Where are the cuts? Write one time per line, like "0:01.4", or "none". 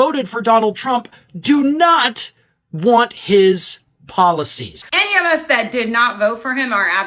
0:04.8